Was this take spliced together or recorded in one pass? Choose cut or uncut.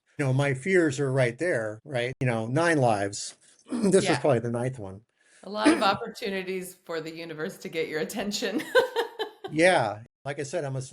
cut